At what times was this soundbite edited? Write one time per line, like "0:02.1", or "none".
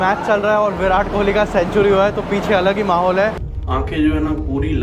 0:03.4